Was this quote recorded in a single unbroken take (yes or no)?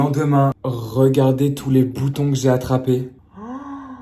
yes